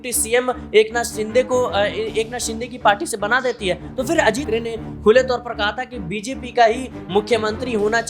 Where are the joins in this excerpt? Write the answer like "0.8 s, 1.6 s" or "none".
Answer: 4.5 s